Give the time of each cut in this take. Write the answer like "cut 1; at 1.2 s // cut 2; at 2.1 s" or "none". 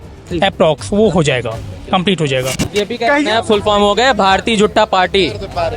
cut 1; at 2.6 s

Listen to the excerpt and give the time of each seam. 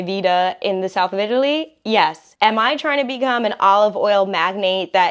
cut 1; at 2.7 s

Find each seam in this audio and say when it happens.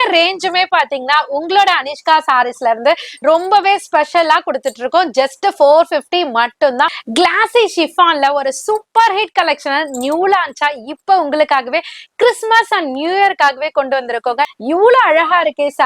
cut 1; at 7.0 s // cut 2; at 14.6 s

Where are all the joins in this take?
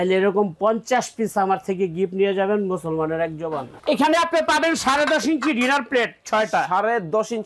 cut 1; at 3.7 s

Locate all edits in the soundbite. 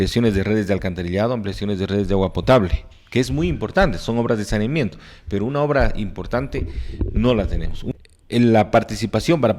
cut 1; at 7.7 s

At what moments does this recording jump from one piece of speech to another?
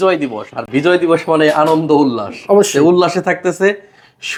none

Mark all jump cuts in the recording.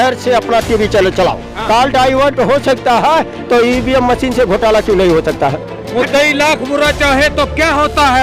cut 1; at 1.5 s // cut 2; at 5.7 s

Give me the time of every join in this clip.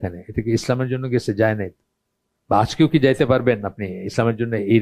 none

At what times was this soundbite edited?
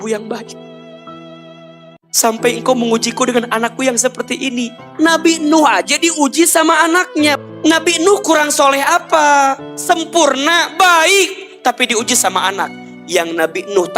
cut 1; at 4.8 s // cut 2; at 7.3 s // cut 3; at 9.7 s

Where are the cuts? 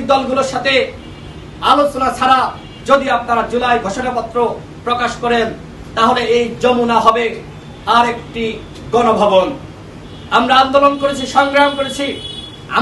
none

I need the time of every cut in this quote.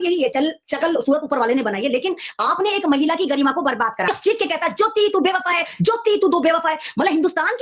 cut 1; at 4.1 s

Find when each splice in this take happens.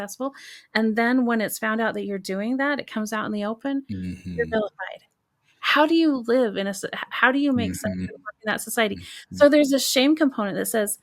none

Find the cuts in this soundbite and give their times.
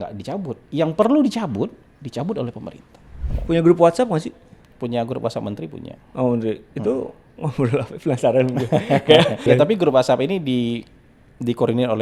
cut 1; at 3.3 s // cut 2; at 9.5 s

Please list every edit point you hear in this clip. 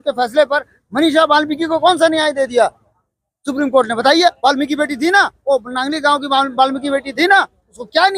none

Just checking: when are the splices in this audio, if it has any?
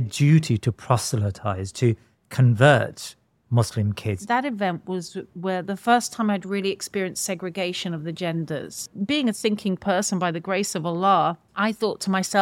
cut 1; at 4.2 s // cut 2; at 8.9 s // cut 3; at 11.5 s

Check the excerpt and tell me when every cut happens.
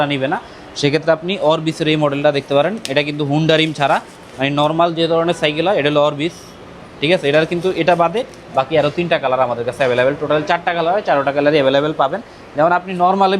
none

